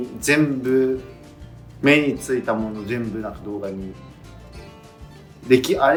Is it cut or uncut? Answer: uncut